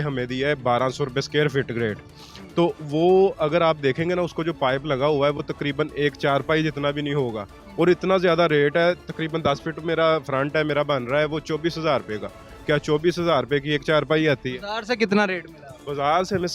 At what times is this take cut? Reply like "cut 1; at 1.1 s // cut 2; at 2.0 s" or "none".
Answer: none

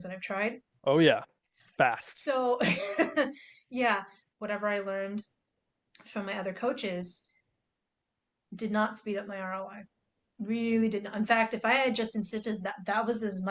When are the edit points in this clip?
cut 1; at 4.3 s

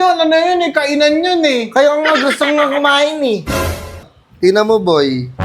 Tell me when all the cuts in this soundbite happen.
cut 1; at 4.0 s

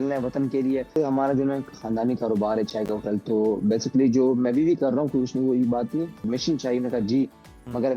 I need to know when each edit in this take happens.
cut 1; at 0.9 s // cut 2; at 6.2 s

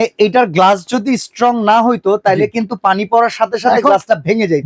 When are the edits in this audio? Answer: none

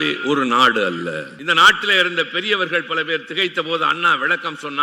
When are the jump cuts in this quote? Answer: cut 1; at 1.3 s

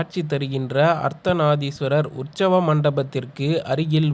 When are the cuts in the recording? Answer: none

